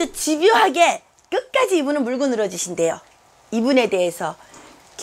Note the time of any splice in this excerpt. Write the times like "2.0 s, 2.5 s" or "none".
none